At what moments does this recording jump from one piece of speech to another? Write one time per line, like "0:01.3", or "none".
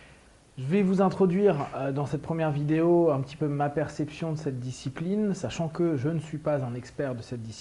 0:03.8